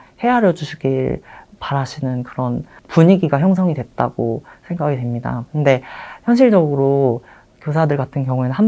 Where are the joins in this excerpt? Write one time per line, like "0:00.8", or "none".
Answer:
0:02.8